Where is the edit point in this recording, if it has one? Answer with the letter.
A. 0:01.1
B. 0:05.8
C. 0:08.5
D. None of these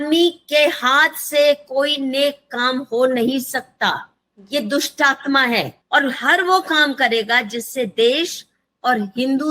B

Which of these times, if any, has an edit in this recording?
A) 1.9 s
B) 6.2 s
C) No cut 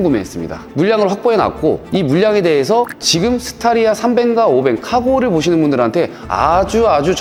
C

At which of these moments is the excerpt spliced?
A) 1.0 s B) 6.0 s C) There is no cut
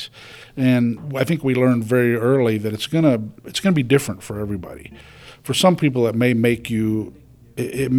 A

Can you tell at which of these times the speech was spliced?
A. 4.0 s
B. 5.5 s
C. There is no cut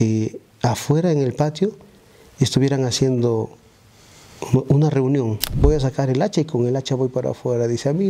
B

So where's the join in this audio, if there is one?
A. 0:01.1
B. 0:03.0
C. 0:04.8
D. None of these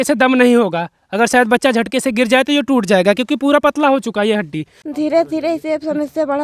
C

